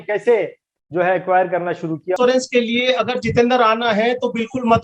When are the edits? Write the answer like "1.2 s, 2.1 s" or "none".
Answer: 2.2 s